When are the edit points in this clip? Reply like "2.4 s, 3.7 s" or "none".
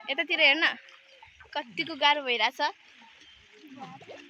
none